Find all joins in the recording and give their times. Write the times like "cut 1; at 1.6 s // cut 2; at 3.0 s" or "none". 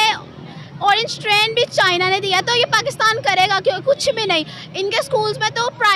none